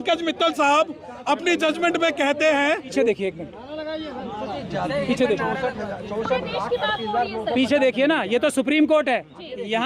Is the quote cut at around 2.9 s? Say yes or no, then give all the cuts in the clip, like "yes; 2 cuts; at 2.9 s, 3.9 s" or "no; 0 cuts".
yes; 1 cut; at 2.9 s